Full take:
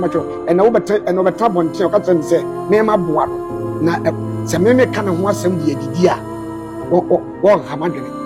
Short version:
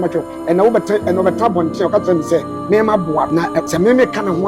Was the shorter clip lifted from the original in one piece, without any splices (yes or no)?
no